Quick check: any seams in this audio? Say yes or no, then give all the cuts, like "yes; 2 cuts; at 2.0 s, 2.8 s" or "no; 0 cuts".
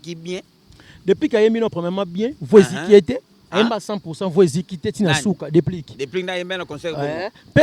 no; 0 cuts